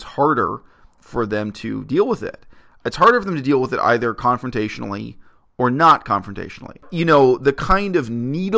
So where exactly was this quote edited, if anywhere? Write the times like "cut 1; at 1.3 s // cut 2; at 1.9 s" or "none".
cut 1; at 6.9 s